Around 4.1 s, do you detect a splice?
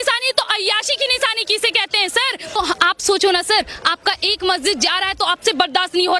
no; 1 cut; at 2.6 s

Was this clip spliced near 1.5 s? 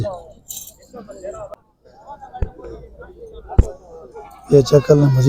yes; 1 cut; at 1.5 s

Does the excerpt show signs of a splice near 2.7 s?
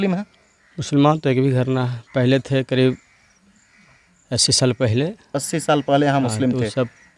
no; 0 cuts

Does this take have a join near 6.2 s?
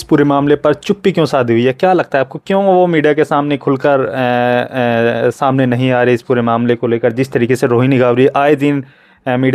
no; 0 cuts

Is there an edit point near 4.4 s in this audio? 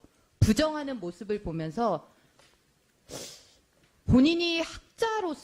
yes; 1 cut; at 4.4 s

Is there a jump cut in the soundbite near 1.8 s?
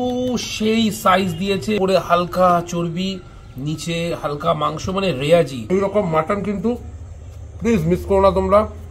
yes; 2 cuts; at 1.8 s, 5.6 s

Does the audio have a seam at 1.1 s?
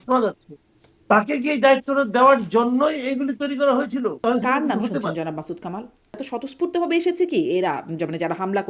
no; 2 cuts; at 4.2 s, 6.3 s

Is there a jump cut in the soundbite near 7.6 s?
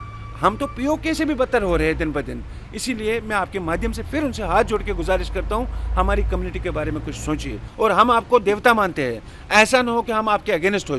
yes; 1 cut; at 7.6 s

